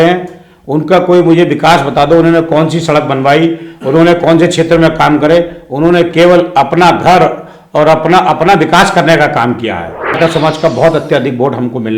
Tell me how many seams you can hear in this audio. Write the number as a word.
one